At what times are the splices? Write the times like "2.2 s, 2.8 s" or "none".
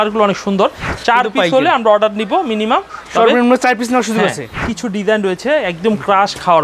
0.9 s, 4.7 s